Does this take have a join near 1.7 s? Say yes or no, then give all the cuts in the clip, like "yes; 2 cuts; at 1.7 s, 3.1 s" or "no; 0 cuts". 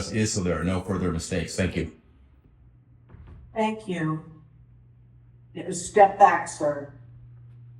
no; 0 cuts